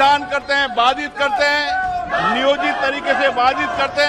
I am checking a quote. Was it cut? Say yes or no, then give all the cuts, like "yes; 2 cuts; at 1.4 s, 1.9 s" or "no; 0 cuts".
no; 0 cuts